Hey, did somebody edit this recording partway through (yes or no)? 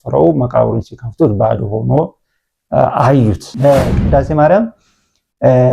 yes